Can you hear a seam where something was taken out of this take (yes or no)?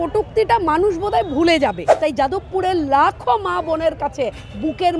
yes